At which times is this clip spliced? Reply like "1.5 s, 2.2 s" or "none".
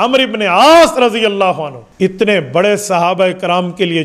2.1 s